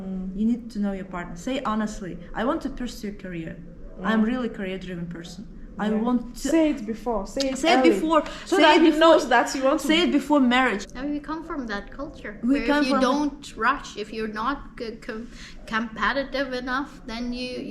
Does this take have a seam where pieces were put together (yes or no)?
yes